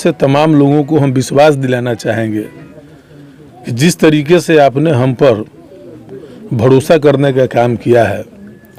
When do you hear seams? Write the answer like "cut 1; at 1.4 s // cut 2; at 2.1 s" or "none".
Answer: none